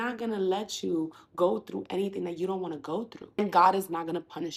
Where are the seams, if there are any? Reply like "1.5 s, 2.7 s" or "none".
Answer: 3.4 s